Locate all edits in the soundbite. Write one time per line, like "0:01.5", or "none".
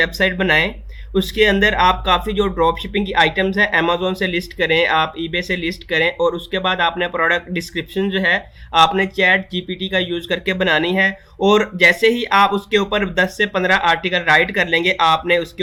none